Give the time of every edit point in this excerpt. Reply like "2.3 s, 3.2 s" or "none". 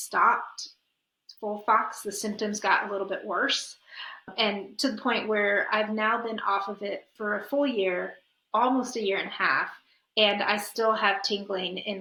none